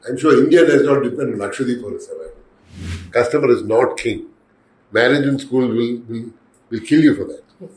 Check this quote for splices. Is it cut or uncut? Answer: cut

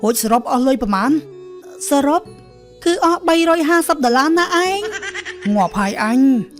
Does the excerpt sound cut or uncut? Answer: cut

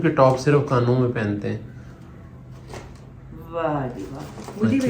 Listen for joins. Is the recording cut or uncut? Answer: uncut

